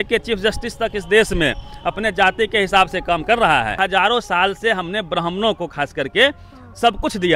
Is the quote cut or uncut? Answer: cut